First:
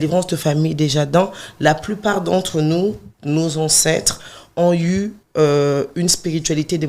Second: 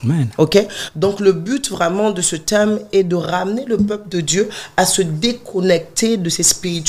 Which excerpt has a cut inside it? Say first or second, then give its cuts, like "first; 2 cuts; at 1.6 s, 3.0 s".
first; 2 cuts; at 3.1 s, 5.2 s